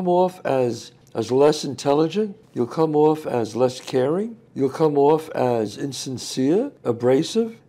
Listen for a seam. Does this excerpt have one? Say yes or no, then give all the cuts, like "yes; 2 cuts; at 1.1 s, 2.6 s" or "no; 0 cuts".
no; 0 cuts